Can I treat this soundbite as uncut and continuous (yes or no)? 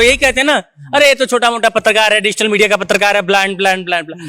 yes